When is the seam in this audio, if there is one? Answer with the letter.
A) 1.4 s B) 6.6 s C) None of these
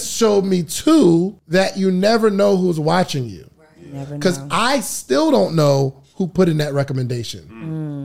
A